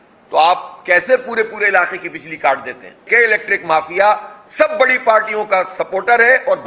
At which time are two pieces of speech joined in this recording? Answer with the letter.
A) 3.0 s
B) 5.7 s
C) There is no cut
A